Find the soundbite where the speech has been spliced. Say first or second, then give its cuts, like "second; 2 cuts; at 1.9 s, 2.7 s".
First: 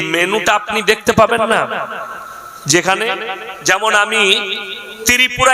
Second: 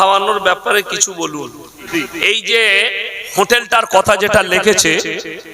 second; 1 cut; at 1.9 s